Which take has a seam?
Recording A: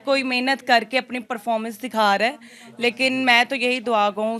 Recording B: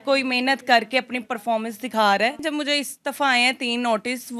B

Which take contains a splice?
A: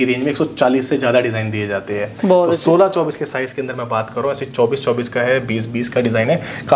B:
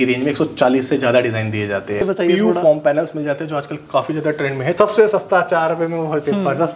B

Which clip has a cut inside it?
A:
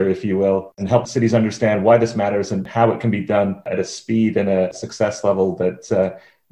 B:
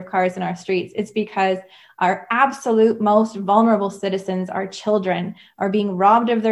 A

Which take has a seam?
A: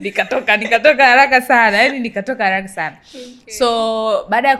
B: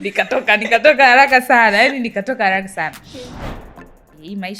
B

